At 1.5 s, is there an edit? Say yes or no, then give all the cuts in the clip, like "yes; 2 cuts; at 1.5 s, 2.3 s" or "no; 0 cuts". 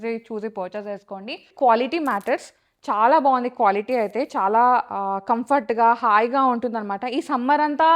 yes; 1 cut; at 1.5 s